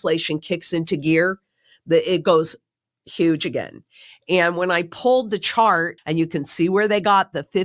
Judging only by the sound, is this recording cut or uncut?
cut